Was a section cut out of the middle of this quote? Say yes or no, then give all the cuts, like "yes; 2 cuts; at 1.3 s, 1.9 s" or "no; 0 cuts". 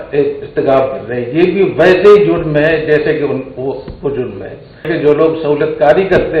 yes; 1 cut; at 4.9 s